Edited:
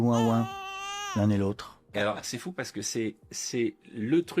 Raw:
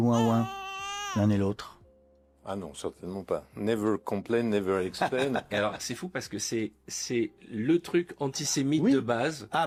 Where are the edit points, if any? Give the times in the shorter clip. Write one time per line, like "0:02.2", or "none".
0:01.9